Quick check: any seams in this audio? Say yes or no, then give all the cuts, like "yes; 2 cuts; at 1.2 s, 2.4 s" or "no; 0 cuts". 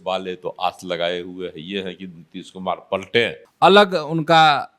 yes; 1 cut; at 3.4 s